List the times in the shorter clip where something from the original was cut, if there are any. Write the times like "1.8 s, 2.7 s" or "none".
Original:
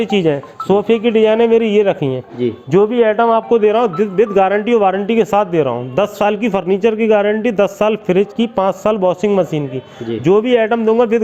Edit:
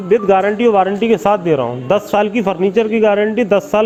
none